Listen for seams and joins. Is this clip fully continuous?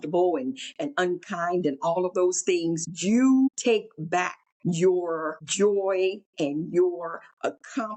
no; 4 cuts; at 2.9 s, 4.0 s, 5.4 s, 6.2 s

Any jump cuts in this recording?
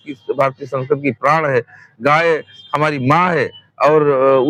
no; 0 cuts

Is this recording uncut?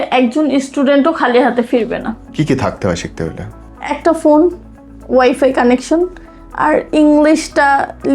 no; 1 cut; at 2.2 s

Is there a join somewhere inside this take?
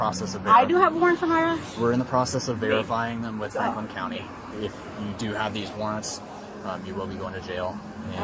no; 0 cuts

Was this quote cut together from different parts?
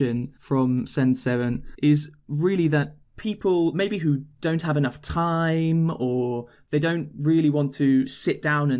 yes; 1 cut; at 1.7 s

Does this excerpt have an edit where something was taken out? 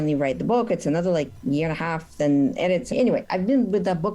yes; 1 cut; at 2.9 s

